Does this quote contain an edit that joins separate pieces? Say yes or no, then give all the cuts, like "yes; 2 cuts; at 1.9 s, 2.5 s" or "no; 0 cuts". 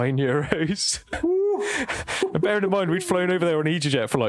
yes; 1 cut; at 1.2 s